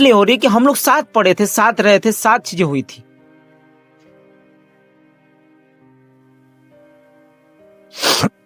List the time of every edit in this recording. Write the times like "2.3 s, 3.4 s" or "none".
none